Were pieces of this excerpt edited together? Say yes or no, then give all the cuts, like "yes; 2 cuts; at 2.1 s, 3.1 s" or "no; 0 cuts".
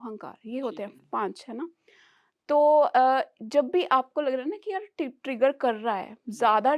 no; 0 cuts